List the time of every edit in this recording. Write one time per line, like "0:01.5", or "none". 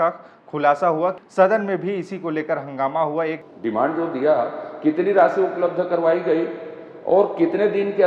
0:01.2
0:03.4